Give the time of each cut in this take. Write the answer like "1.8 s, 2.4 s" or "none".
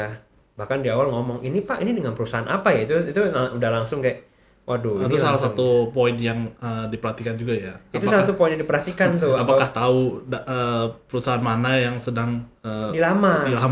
none